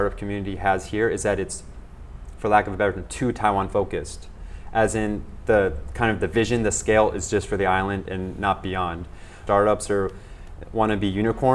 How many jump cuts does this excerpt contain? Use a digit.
1